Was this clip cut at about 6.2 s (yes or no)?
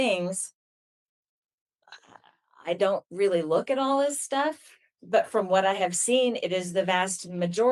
no